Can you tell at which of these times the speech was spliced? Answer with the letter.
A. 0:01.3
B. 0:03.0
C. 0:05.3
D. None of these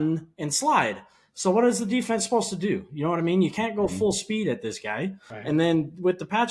C